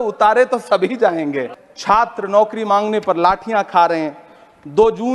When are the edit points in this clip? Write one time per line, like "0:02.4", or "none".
0:01.5